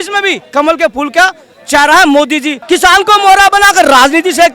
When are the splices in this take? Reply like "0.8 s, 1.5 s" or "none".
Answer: 2.6 s